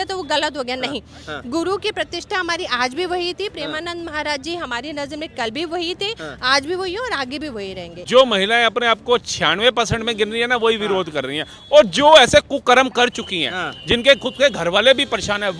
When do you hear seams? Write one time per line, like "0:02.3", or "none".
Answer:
0:08.1